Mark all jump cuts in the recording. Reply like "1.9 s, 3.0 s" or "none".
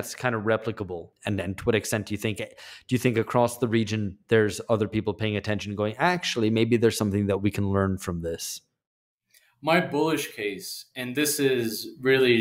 1.1 s